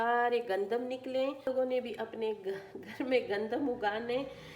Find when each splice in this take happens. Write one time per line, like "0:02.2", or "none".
0:01.4